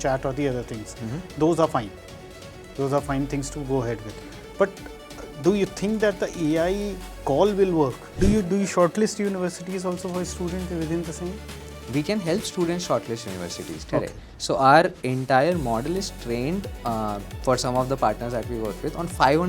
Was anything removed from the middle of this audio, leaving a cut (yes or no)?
yes